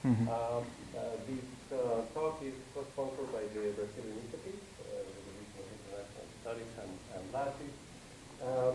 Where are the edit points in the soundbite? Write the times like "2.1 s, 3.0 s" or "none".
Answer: 4.1 s